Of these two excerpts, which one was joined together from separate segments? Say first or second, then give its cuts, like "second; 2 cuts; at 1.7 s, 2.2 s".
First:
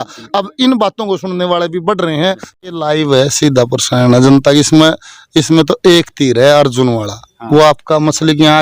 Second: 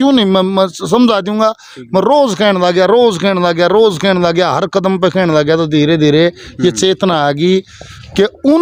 first; 1 cut; at 2.5 s